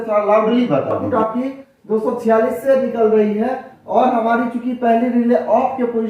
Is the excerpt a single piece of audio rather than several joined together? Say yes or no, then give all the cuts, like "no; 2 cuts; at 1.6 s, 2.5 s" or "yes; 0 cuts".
no; 1 cut; at 1.0 s